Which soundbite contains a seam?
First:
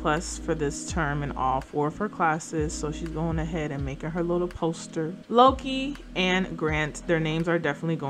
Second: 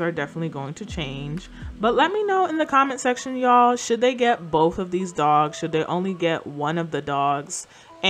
first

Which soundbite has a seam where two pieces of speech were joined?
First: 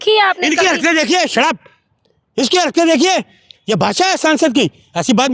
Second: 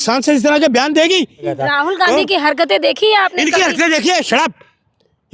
second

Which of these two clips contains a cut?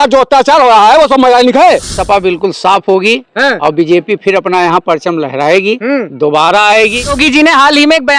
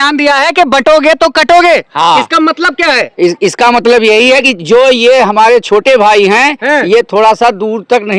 first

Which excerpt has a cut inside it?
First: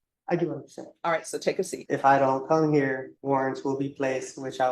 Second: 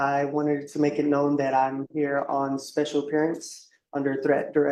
first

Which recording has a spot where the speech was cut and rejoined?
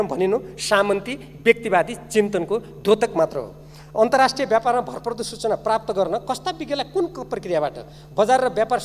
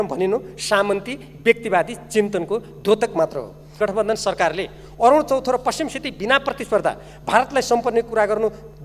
second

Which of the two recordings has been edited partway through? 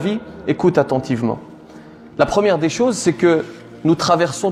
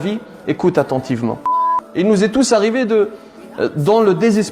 second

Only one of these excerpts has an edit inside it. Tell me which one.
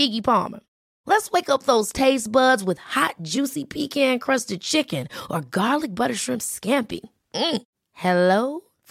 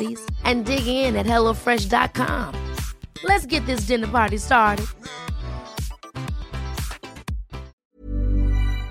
second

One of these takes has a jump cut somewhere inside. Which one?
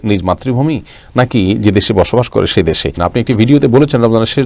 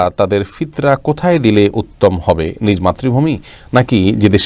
first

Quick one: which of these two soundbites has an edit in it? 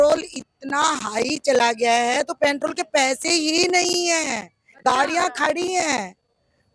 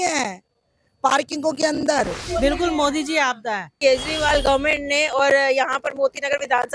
second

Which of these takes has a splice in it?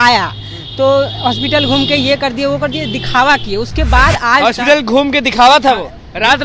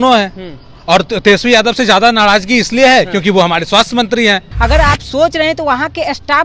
second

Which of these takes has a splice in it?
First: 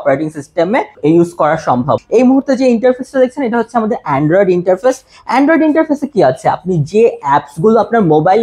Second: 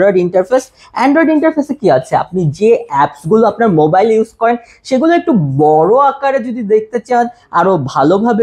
first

